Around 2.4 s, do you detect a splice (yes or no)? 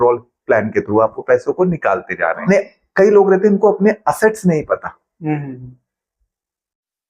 yes